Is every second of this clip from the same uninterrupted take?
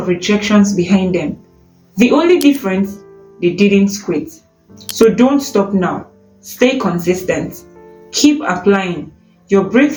yes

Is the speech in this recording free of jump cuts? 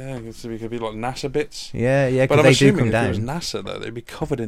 yes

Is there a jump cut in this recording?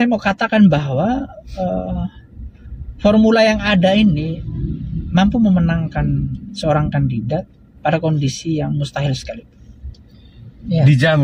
no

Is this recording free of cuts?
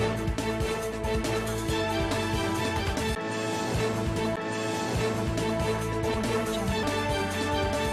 no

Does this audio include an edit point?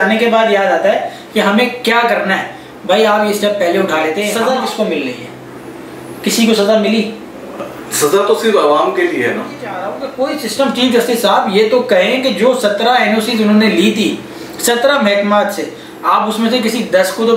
yes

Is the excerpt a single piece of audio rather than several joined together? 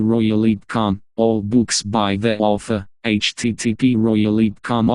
no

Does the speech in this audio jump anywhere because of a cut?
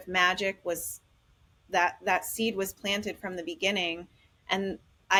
no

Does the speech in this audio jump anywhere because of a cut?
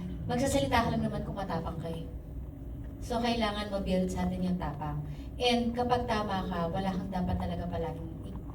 no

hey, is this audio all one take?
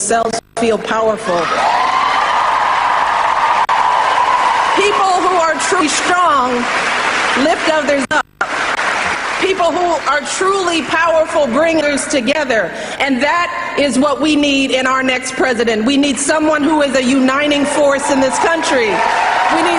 no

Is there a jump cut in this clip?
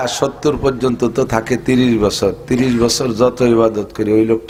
no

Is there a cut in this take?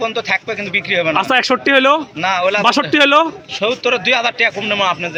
no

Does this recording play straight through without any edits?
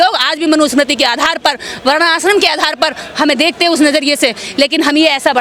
yes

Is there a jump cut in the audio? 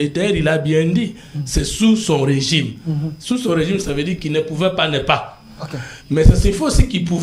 no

